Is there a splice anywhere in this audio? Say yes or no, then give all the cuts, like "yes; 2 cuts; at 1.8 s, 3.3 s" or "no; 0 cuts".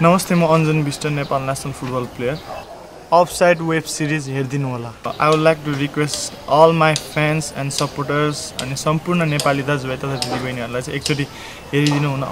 no; 0 cuts